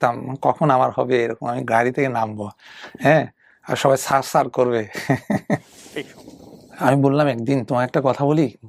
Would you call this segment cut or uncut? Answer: cut